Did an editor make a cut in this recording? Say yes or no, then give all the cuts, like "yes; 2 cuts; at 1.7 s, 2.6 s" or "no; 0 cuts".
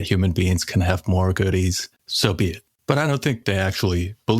yes; 2 cuts; at 2.3 s, 3.4 s